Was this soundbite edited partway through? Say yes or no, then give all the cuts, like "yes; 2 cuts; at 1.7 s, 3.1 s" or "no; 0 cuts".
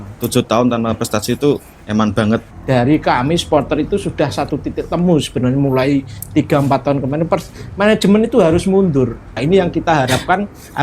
yes; 3 cuts; at 1.7 s, 2.5 s, 9.4 s